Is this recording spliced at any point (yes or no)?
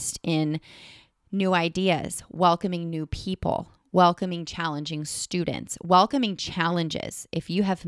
no